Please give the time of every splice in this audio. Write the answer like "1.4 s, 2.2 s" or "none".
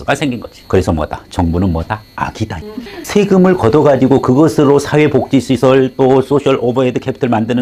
none